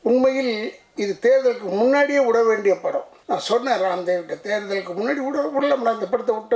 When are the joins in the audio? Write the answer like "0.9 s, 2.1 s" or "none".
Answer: 3.1 s